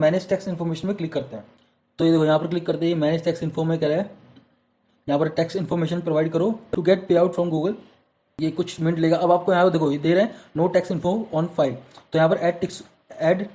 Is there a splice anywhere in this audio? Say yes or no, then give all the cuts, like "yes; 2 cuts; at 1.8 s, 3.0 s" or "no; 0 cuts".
no; 0 cuts